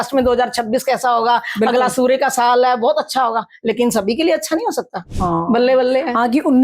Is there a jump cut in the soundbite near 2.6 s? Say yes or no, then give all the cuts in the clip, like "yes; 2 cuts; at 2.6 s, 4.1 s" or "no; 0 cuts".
no; 1 cut; at 5.0 s